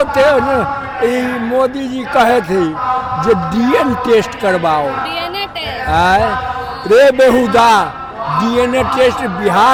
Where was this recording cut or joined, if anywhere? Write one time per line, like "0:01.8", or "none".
none

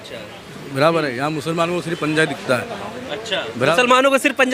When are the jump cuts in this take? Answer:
none

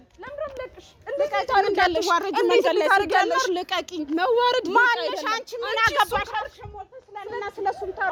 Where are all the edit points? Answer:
none

